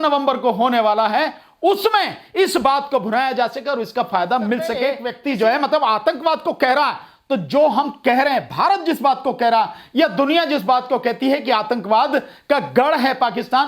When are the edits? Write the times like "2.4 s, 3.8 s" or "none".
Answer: 5.1 s